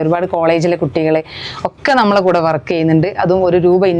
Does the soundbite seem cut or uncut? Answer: uncut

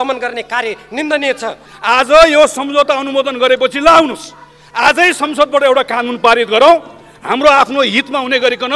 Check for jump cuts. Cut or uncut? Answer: cut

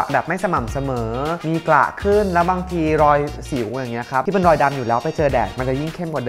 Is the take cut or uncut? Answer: uncut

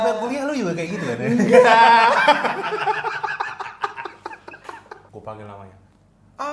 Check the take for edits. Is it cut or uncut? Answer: cut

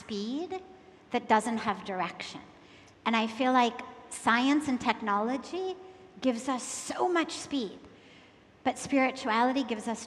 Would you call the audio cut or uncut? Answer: uncut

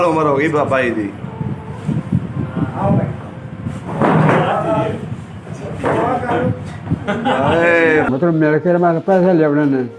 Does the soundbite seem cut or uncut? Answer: cut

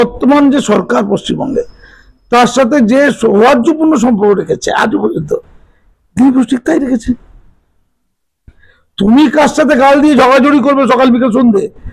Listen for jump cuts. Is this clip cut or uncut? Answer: uncut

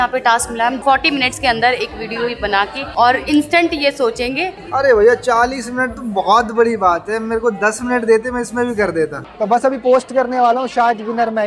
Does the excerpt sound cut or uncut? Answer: cut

